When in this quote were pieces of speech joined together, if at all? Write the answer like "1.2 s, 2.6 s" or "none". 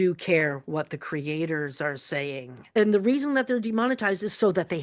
none